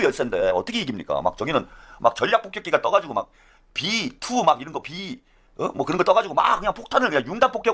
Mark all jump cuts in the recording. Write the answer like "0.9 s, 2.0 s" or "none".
none